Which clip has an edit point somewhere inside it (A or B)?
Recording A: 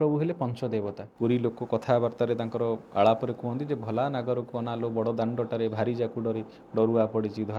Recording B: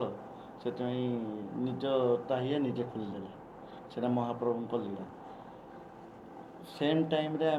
A